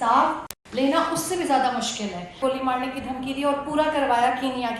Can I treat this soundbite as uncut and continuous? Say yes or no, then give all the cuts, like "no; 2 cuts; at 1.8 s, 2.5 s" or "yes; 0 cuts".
no; 1 cut; at 2.4 s